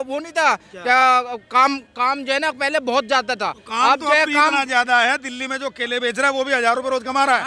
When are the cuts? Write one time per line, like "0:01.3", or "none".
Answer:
none